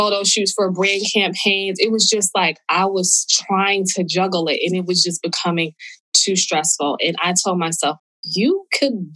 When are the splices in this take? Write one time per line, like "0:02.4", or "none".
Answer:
0:08.0